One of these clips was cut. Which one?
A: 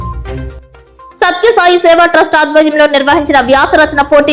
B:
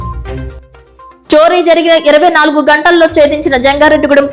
A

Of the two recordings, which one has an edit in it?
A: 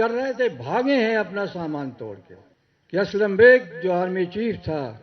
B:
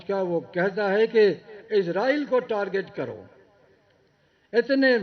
A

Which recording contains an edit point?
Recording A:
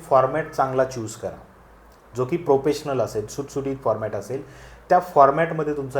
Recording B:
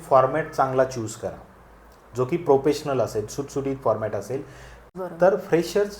B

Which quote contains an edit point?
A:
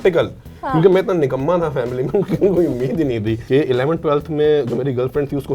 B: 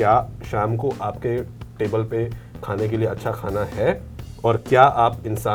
A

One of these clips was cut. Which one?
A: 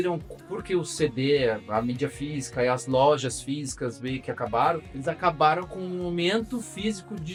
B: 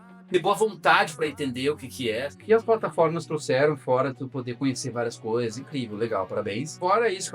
B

